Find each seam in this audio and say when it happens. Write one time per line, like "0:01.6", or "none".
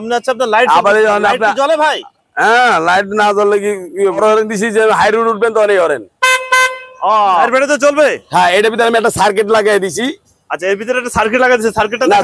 0:04.2
0:07.5

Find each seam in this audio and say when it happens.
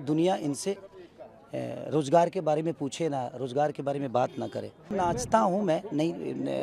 0:04.9

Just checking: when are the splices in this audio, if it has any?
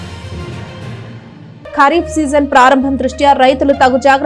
0:01.1

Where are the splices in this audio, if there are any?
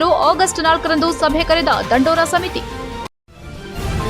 0:03.1

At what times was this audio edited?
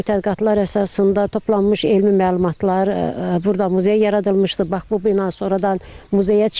none

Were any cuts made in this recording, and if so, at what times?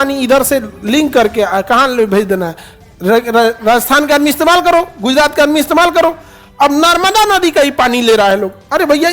none

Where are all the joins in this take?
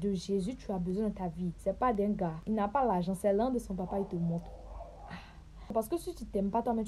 0:01.6
0:02.4
0:05.7

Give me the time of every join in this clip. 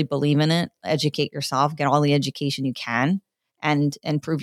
none

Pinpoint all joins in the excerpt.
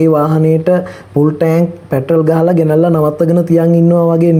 none

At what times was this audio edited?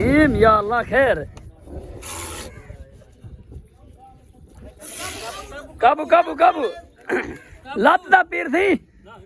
none

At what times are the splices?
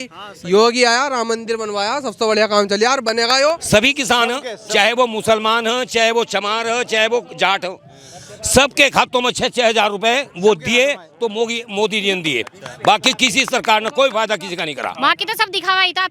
0:03.6
0:14.9

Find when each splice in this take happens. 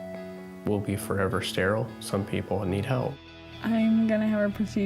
0:03.2

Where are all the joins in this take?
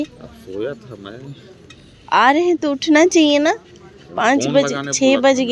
none

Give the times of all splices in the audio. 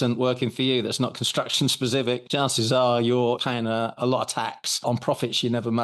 0:02.2
0:03.4
0:04.6

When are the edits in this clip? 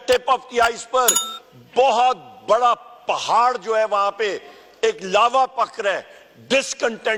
none

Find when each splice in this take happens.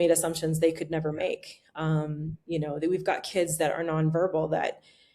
none

